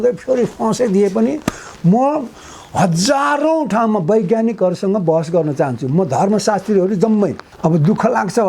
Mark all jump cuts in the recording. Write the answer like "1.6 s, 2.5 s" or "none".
7.5 s